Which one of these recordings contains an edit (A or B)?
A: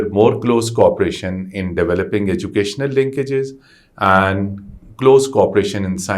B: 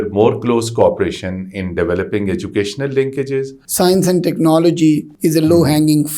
B